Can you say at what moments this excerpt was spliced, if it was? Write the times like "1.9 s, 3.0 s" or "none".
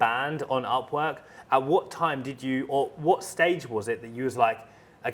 none